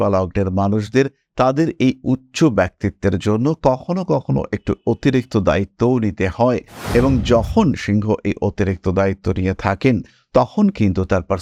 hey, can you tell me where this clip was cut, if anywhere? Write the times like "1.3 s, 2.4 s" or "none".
none